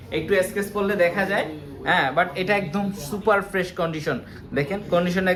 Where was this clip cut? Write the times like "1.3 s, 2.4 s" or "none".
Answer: none